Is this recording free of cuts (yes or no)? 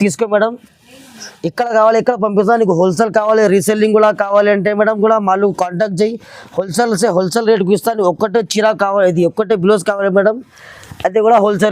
yes